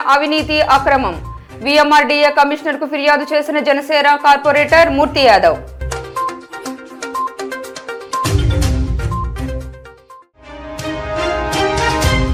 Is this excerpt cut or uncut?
uncut